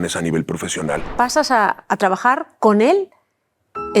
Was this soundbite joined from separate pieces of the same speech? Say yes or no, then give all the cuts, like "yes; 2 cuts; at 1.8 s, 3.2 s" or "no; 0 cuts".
yes; 1 cut; at 1.1 s